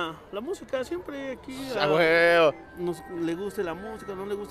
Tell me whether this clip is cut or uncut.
cut